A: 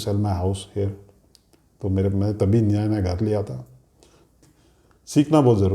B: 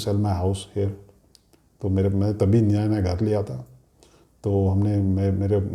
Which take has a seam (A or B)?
A